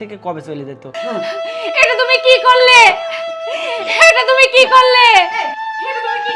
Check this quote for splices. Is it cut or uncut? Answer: cut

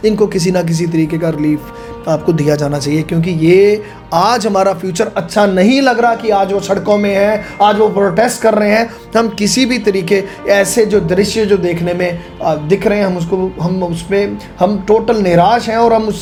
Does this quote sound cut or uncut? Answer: uncut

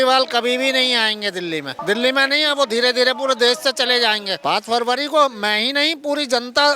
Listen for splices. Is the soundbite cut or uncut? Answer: cut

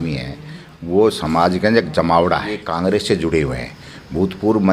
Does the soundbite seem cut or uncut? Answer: cut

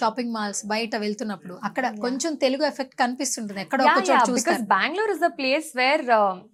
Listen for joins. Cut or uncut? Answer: uncut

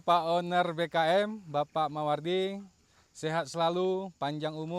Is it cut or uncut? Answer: uncut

